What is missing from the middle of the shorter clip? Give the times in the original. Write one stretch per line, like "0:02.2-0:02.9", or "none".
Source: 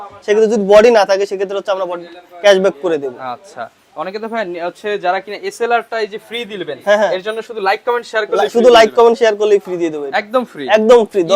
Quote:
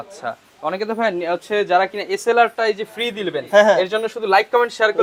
none

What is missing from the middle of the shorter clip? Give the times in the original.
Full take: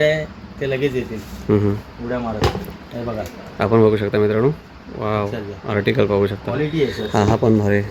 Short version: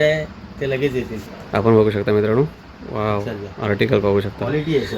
0:01.3-0:03.4

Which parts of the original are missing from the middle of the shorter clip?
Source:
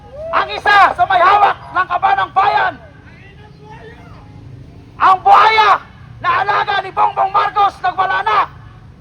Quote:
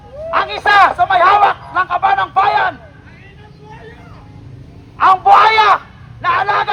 none

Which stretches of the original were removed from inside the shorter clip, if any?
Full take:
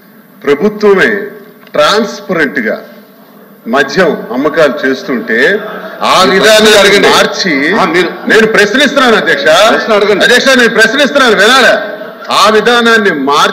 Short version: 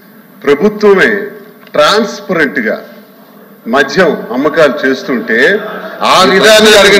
none

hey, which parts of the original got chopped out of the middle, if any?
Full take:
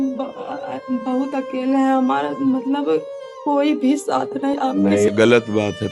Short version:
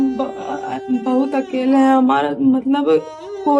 none

